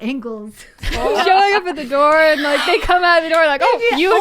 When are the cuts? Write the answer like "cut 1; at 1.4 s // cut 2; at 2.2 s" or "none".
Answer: cut 1; at 1.2 s